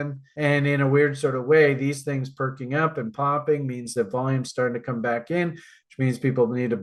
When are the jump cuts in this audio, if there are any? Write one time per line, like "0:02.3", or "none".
none